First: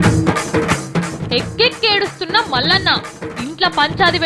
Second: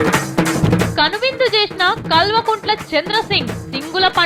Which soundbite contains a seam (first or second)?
first